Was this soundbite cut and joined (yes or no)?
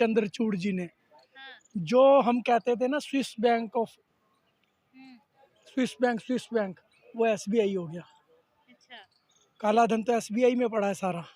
no